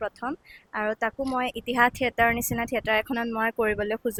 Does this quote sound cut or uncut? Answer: uncut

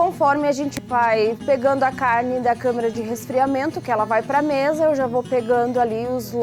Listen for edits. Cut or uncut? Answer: uncut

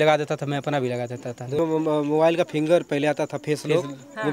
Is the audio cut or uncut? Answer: cut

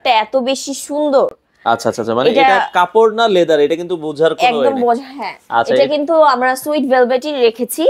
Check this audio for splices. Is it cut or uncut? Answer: uncut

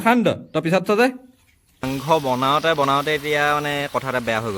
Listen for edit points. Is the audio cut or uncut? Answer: cut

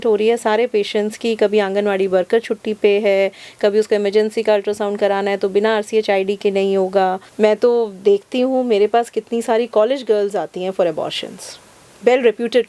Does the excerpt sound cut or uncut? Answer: cut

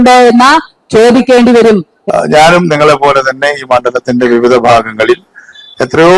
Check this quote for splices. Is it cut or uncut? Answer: cut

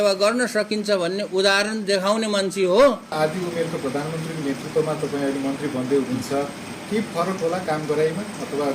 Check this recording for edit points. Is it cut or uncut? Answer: cut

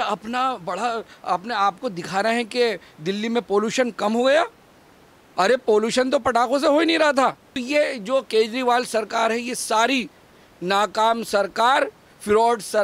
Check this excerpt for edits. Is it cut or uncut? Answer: cut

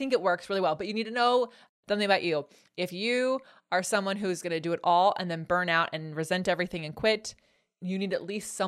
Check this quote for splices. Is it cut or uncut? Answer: cut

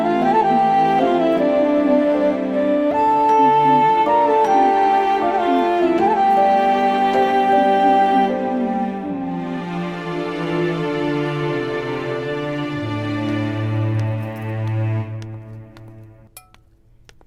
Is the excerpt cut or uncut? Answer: uncut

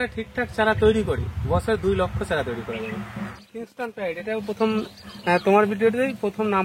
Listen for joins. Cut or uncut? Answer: cut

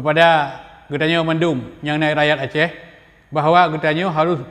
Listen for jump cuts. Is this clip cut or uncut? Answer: uncut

